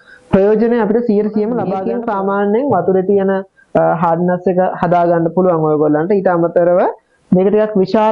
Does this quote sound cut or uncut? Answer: cut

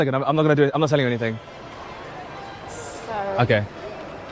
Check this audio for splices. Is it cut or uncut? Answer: uncut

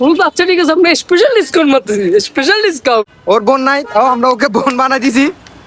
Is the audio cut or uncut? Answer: cut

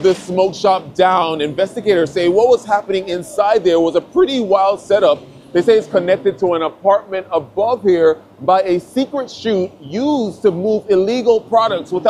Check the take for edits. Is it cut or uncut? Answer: uncut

